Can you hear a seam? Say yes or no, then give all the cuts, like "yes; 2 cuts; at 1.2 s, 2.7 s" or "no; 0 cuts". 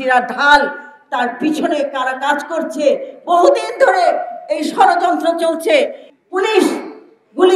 yes; 1 cut; at 6.0 s